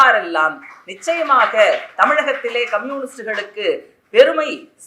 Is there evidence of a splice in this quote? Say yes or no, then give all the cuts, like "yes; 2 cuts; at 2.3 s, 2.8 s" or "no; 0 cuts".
no; 0 cuts